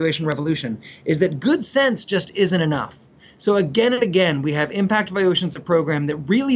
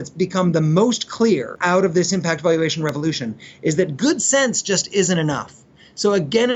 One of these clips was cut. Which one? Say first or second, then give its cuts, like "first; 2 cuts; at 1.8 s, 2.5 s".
second; 1 cut; at 1.5 s